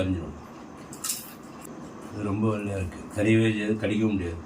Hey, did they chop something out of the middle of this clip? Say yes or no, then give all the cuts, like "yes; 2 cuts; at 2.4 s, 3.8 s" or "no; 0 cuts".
yes; 1 cut; at 1.7 s